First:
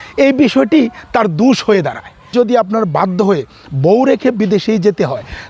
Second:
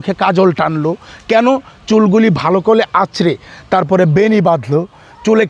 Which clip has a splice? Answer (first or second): first